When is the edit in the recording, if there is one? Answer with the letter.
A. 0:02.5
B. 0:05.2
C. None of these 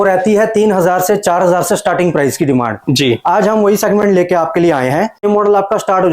B